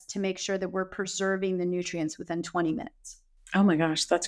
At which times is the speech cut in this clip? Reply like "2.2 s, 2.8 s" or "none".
none